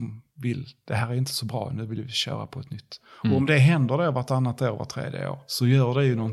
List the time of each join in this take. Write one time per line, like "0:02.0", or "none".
0:05.4